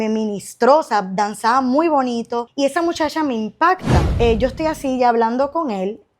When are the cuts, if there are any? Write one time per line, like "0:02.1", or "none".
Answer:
0:02.5
0:04.0